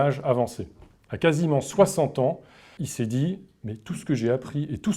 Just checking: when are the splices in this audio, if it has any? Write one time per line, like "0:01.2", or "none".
0:02.7